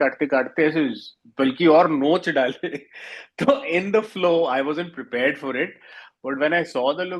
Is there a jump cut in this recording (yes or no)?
no